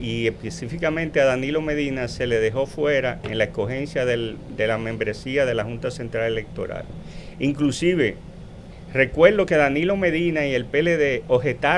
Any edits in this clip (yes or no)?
no